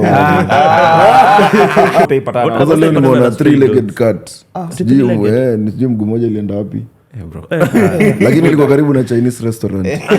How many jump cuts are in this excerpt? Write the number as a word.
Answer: one